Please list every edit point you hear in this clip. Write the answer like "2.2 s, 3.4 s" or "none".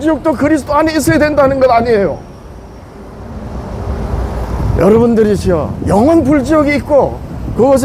none